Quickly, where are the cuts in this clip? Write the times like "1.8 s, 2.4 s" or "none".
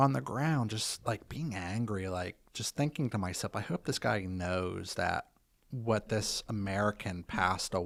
none